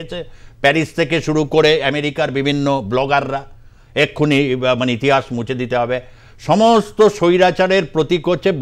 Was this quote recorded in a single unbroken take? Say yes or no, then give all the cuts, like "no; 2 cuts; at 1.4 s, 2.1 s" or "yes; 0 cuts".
yes; 0 cuts